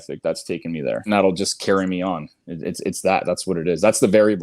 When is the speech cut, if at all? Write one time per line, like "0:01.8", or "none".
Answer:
0:01.1